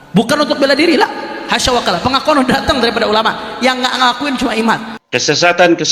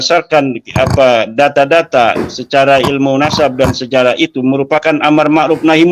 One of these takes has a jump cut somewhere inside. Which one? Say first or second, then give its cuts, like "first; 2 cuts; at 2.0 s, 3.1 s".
first; 1 cut; at 4.9 s